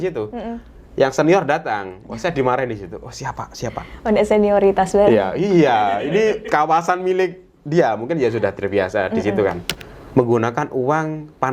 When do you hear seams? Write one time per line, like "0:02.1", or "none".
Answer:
0:09.7